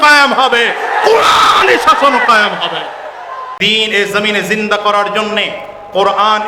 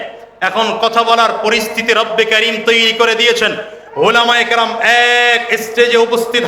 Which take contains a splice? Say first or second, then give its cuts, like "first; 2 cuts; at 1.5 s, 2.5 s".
first; 1 cut; at 3.5 s